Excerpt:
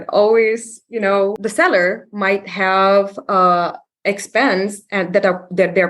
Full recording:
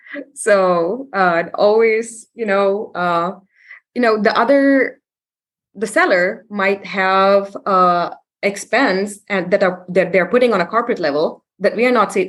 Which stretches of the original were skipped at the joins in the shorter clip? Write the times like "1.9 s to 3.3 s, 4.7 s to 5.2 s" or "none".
2.8 s to 5.7 s